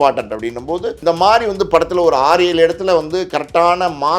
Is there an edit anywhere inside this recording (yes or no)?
yes